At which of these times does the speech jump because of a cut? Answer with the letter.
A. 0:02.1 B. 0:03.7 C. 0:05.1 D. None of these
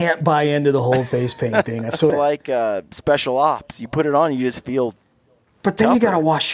A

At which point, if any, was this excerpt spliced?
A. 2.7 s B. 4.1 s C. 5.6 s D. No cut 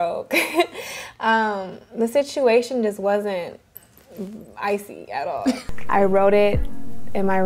C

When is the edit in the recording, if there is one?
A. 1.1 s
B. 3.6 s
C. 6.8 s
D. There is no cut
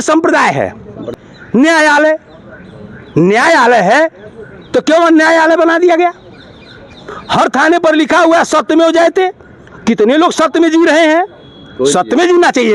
A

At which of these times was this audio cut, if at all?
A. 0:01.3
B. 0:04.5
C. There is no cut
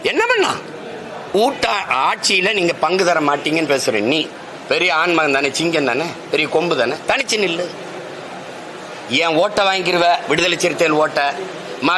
A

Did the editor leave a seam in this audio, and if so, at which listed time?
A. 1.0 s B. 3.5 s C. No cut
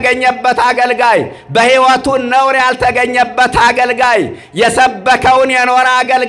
C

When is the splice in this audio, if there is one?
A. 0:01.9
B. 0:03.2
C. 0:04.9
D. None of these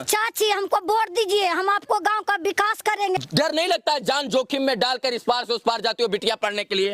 B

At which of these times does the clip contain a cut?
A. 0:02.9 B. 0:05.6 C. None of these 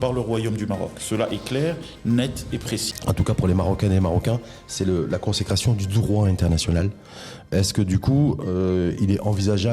A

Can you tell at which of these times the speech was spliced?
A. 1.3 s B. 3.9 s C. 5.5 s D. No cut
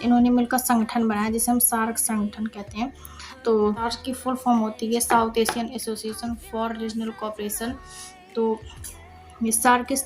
B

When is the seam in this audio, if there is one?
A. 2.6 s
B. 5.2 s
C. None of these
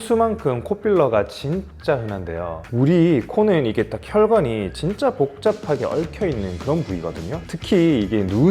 A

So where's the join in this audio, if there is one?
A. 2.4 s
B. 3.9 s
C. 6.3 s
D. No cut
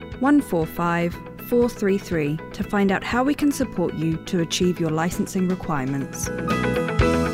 C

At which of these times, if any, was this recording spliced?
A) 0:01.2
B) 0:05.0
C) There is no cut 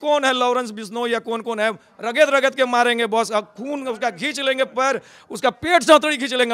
C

